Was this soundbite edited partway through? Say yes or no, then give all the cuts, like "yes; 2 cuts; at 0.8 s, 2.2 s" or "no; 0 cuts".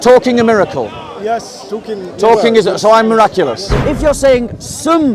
yes; 1 cut; at 3.7 s